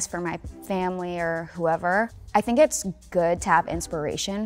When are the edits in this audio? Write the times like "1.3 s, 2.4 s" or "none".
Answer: 2.2 s

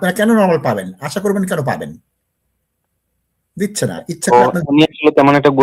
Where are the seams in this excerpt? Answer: none

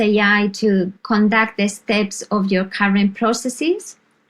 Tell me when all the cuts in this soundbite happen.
1.0 s

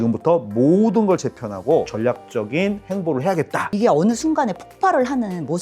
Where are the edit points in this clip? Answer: 3.7 s

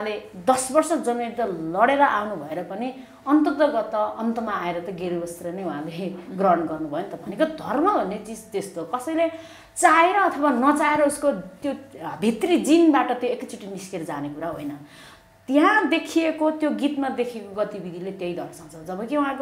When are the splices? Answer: none

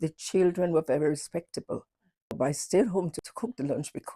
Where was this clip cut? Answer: 2.3 s, 3.2 s

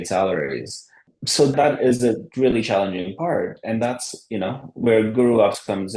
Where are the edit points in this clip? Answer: 1.5 s

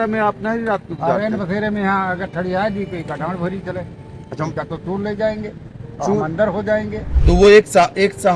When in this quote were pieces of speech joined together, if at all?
7.1 s

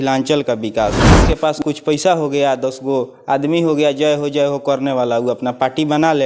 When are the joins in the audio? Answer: 1.2 s

